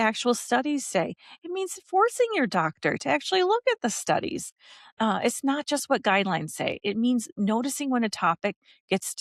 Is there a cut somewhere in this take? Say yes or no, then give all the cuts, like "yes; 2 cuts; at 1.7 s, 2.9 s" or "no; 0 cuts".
no; 0 cuts